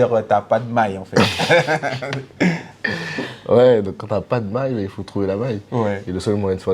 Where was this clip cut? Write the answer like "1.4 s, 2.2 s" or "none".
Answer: none